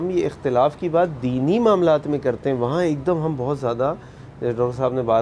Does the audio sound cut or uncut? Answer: uncut